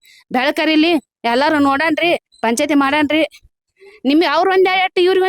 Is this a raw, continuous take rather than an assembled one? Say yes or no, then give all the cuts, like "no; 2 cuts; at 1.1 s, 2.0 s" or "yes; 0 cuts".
yes; 0 cuts